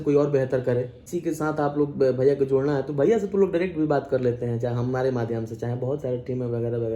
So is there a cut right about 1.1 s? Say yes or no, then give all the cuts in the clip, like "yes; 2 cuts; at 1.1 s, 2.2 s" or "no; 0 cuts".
yes; 1 cut; at 1.1 s